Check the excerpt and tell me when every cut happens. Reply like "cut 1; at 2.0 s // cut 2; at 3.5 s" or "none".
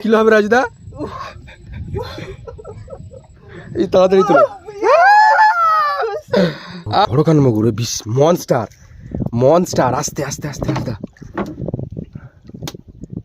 cut 1; at 7.1 s

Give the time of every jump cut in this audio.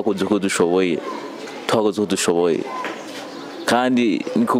none

